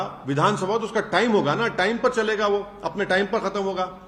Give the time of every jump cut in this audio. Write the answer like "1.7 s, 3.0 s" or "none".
none